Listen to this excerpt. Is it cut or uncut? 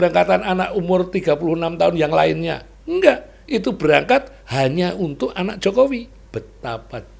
cut